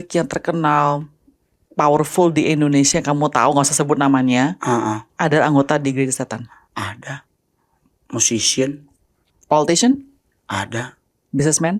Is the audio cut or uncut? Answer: uncut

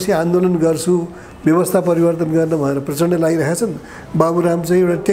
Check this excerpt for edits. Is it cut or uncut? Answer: uncut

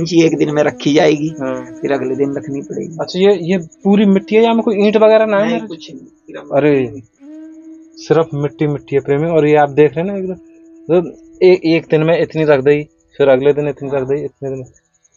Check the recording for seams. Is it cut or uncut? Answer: uncut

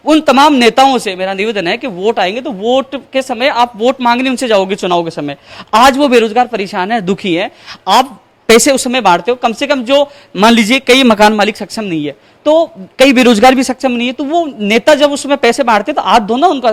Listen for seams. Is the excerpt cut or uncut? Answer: uncut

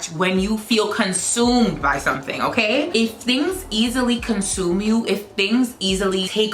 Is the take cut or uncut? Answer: uncut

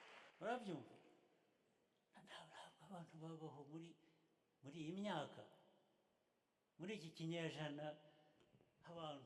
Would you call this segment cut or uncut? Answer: uncut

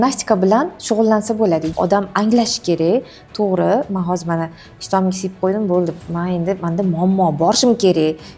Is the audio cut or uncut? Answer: cut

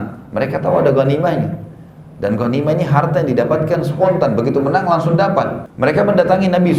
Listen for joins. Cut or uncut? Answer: cut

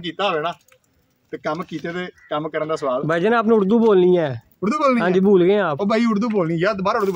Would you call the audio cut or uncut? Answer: cut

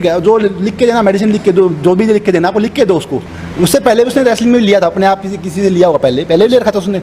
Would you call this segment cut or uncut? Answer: cut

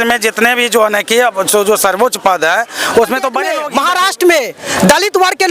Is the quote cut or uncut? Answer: cut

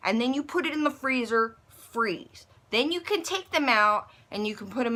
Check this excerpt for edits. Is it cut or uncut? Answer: uncut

